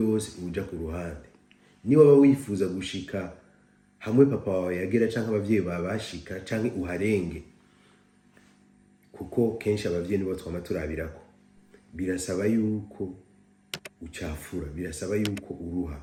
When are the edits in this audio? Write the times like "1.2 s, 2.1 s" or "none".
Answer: none